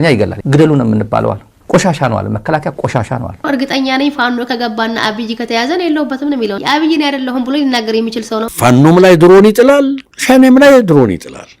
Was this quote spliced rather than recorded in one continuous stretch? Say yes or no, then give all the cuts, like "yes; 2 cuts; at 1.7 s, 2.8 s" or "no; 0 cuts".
yes; 3 cuts; at 3.4 s, 6.6 s, 8.5 s